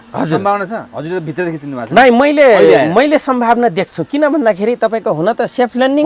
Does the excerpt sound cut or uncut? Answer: uncut